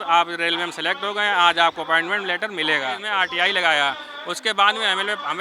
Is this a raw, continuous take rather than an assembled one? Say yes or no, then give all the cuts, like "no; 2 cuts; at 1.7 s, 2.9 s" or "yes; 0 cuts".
no; 1 cut; at 3.0 s